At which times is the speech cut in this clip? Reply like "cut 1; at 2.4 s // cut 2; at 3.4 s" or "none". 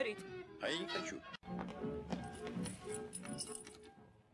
cut 1; at 1.4 s